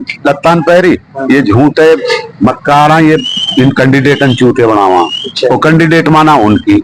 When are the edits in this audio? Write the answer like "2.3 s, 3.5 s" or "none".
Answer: none